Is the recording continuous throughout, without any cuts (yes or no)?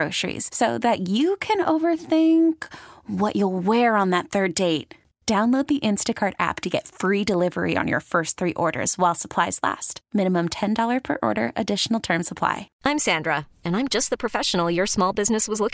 yes